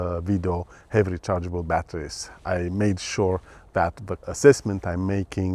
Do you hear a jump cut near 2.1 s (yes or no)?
no